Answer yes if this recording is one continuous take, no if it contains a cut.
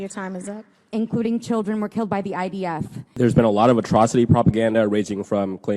no